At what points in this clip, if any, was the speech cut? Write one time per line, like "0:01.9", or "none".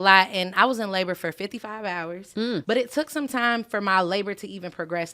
0:02.6